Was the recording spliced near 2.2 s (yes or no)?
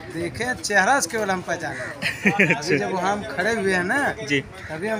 no